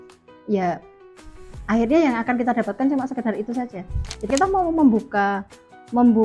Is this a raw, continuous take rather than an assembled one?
no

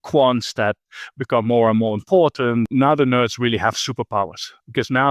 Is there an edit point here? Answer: yes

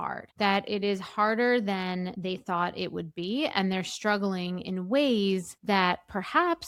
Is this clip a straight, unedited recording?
yes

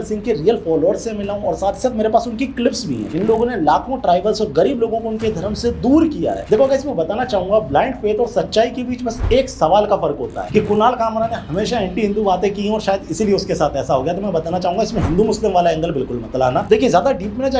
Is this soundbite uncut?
no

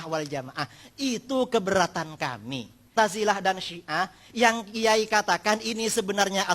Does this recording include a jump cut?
yes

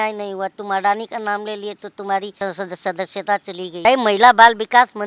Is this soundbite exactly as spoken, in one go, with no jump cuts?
no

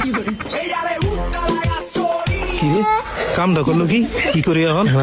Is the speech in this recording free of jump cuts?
yes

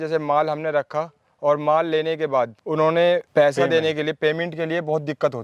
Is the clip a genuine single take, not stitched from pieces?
no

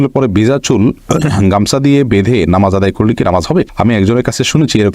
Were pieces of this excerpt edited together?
no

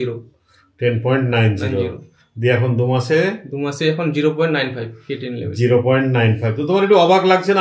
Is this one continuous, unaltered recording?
yes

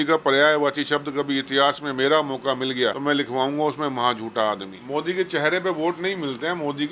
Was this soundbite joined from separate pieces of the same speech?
yes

